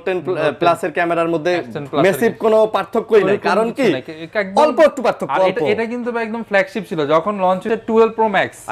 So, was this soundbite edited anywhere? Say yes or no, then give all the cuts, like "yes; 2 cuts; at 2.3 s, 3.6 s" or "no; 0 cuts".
yes; 1 cut; at 7.6 s